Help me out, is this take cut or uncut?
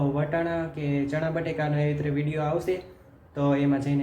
uncut